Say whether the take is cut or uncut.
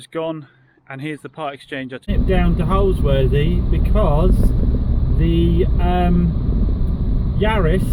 cut